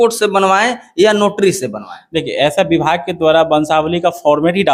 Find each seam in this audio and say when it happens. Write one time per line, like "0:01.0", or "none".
none